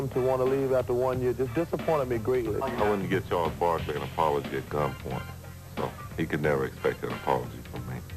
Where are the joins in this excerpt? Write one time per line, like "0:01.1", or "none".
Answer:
0:02.5